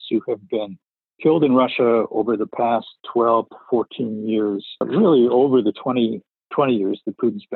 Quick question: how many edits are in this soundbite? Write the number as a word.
two